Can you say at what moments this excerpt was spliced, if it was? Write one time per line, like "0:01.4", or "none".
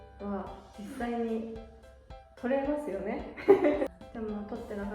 0:03.9